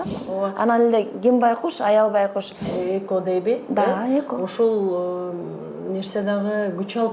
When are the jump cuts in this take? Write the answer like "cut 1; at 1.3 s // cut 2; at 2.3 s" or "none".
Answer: cut 1; at 2.6 s